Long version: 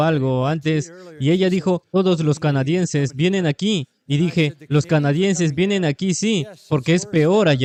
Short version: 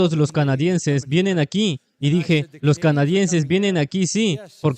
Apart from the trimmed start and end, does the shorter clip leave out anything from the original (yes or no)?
no